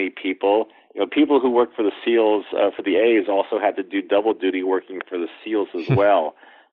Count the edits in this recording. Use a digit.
0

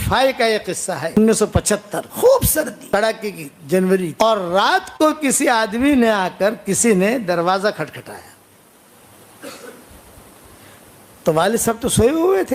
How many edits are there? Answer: 4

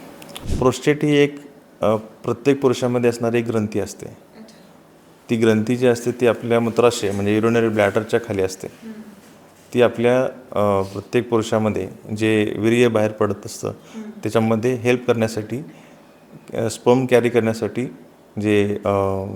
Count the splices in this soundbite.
0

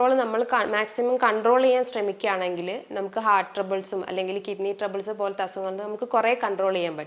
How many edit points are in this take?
0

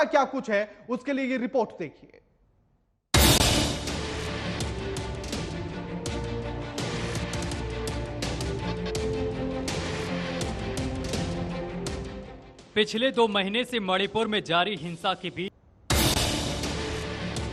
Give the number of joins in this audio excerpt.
1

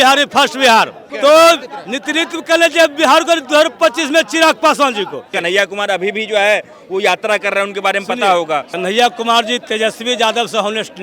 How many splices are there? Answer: 3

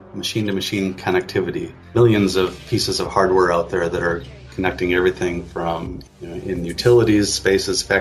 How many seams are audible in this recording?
2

